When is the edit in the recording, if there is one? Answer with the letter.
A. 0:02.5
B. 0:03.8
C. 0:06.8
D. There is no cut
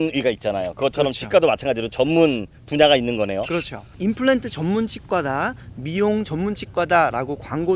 B